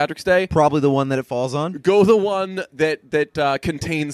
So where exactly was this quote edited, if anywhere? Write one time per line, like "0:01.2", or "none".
none

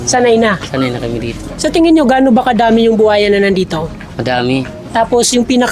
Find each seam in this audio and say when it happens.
0:01.4

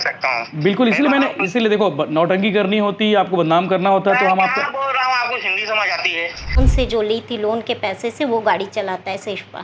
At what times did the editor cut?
0:06.6

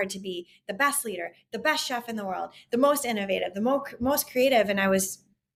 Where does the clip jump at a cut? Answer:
none

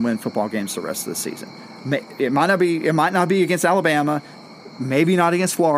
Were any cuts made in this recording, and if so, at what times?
none

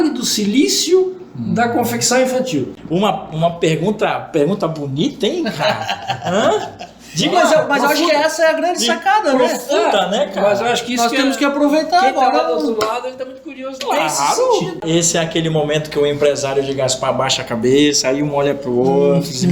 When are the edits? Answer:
0:02.8
0:14.8

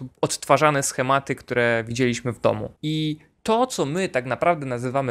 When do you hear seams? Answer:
0:02.7

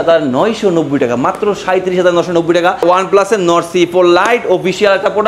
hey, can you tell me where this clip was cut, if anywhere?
0:02.8

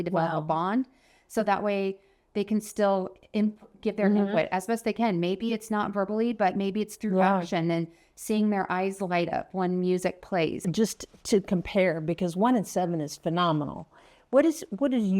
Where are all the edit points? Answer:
0:10.6

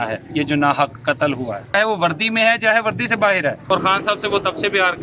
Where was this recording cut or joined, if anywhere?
0:01.7
0:03.6

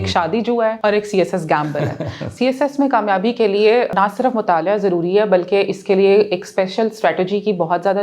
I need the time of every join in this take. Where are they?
0:00.8
0:02.3
0:03.9

